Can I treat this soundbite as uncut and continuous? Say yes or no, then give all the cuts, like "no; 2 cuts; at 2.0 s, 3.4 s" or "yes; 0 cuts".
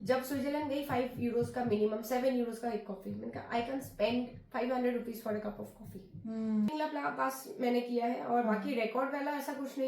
no; 1 cut; at 6.7 s